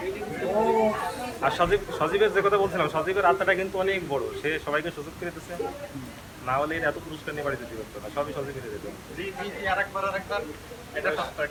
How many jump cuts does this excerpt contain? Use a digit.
0